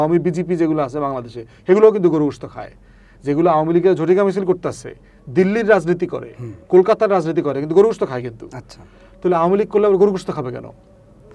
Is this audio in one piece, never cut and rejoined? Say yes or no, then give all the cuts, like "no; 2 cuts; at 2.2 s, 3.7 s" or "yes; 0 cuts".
yes; 0 cuts